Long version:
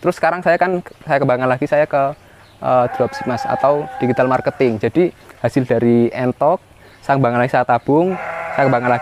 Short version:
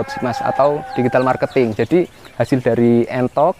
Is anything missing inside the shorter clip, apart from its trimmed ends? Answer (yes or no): no